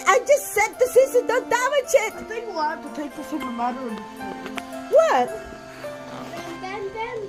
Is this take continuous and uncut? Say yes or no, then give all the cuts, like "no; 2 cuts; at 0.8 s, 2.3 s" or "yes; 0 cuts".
yes; 0 cuts